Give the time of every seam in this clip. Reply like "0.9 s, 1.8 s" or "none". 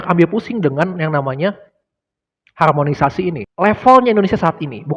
3.5 s